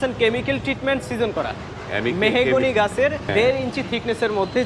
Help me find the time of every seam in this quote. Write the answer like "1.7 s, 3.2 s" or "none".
3.3 s